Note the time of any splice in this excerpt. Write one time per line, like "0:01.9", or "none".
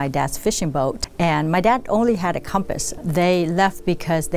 0:01.0
0:02.9